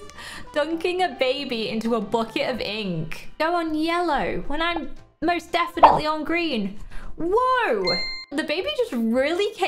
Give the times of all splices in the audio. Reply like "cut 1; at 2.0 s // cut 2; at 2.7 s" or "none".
cut 1; at 3.2 s // cut 2; at 8.2 s